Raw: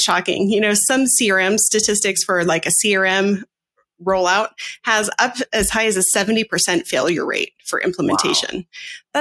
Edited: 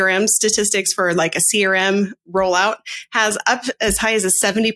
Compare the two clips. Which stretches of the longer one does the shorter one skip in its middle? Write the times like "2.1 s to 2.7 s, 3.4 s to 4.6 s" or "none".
3.5 s to 3.9 s